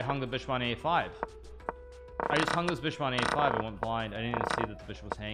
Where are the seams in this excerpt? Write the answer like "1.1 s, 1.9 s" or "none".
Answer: none